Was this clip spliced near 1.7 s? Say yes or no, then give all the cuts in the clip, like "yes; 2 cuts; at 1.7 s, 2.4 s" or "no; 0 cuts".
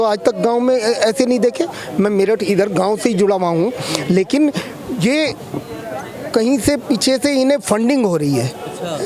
no; 0 cuts